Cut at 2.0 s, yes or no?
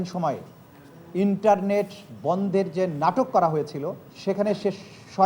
no